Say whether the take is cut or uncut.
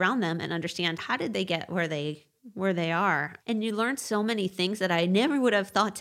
cut